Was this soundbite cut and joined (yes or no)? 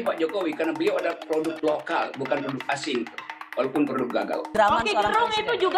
yes